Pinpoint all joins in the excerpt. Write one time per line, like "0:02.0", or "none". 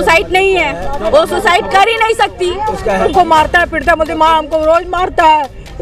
0:03.0